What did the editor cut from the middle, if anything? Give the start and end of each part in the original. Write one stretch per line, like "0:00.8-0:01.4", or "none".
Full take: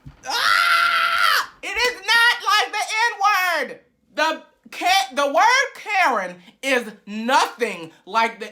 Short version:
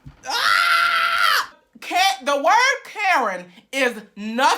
0:01.6-0:04.5